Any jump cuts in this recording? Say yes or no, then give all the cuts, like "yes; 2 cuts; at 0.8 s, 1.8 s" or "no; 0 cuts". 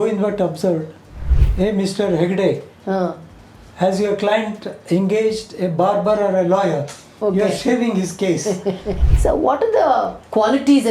yes; 1 cut; at 8.9 s